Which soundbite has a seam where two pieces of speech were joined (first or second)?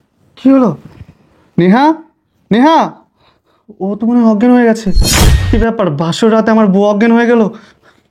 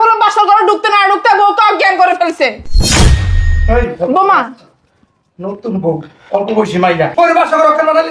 second